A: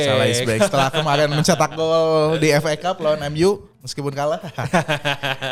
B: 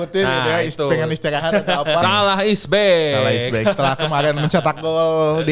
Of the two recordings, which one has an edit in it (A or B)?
B